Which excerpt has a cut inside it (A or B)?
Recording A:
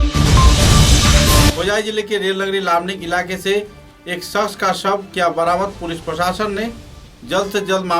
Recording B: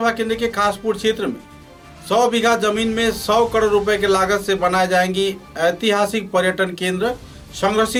A